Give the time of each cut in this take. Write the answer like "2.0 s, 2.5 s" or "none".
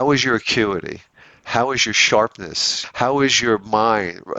2.8 s